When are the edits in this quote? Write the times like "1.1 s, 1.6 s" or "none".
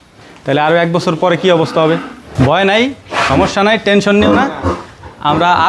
2.2 s